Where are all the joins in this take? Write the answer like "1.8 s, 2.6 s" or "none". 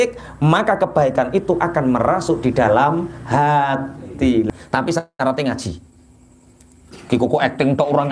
4.5 s